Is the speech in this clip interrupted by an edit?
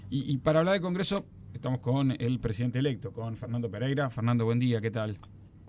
no; 0 cuts

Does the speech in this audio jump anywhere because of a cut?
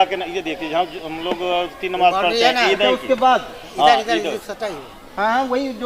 no; 0 cuts

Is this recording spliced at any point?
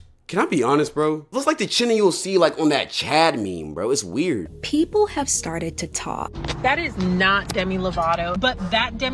yes; 3 cuts; at 1.3 s, 4.5 s, 8.4 s

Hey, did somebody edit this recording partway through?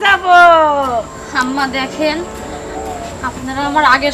no; 0 cuts

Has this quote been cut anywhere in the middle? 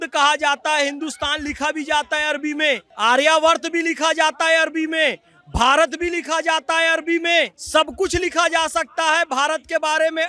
yes; 2 cuts; at 2.9 s, 7.6 s

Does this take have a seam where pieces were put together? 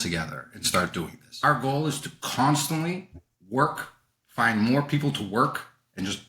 yes; 1 cut; at 1.2 s

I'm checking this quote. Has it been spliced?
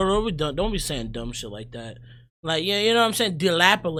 no; 0 cuts

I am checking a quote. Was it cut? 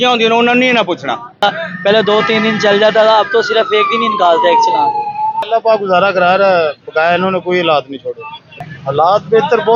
yes; 3 cuts; at 1.4 s, 5.4 s, 8.6 s

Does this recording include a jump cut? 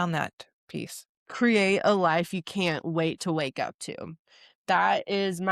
yes; 1 cut; at 1.2 s

